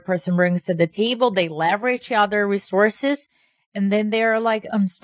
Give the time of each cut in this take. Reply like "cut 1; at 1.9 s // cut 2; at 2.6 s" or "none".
none